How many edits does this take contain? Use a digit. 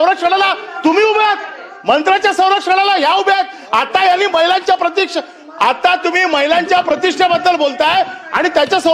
0